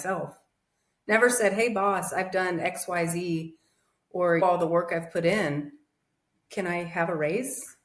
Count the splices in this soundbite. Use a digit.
0